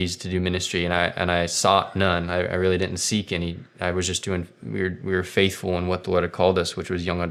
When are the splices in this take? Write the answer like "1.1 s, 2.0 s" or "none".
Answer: none